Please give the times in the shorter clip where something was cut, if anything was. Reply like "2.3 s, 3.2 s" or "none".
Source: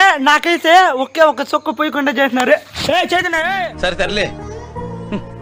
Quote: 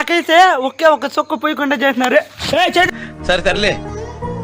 3.1 s